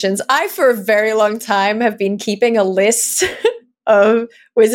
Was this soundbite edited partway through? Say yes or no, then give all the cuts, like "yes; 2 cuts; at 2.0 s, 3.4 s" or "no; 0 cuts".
no; 0 cuts